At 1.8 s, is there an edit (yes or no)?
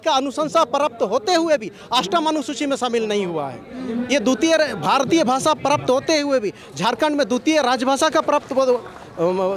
no